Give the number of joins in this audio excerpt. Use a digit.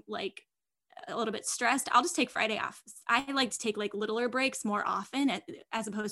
0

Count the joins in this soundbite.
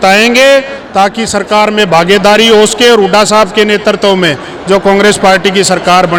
0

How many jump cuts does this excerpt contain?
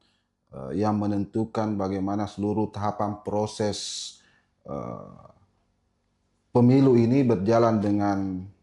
0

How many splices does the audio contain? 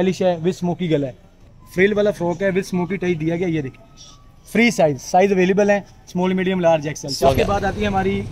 2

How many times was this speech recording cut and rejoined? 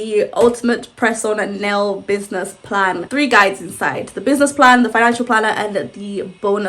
1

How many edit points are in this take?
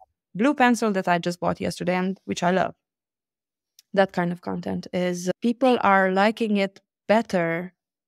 0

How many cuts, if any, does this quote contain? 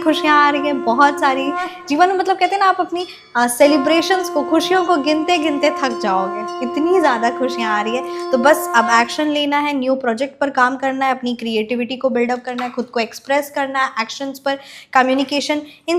0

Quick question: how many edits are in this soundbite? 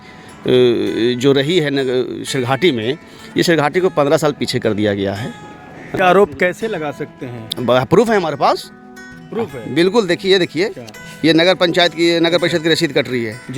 1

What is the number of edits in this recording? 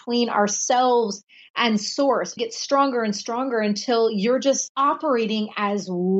2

